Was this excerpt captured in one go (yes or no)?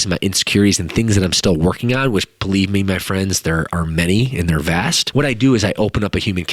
no